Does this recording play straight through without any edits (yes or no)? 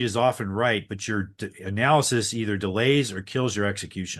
yes